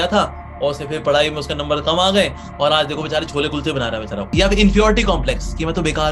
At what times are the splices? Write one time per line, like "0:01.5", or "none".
0:02.4
0:04.3

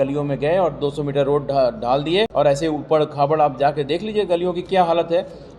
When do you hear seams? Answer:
0:02.3

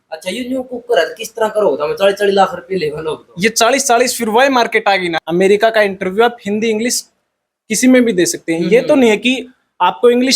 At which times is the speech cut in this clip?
0:05.2

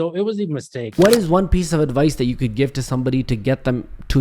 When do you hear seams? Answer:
0:00.9

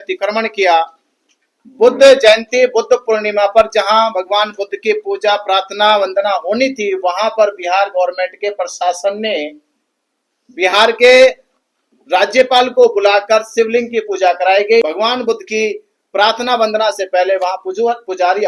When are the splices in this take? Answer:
0:14.8

